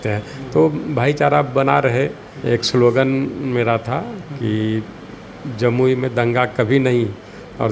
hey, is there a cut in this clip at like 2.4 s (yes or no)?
yes